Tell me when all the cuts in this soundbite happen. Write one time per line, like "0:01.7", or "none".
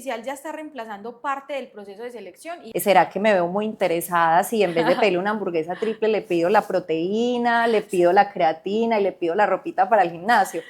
0:02.6